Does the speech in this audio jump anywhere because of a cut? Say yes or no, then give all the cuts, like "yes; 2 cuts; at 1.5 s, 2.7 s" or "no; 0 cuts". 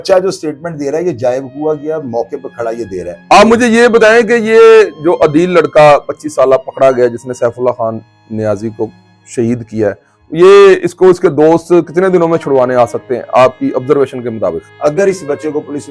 yes; 2 cuts; at 3.1 s, 14.7 s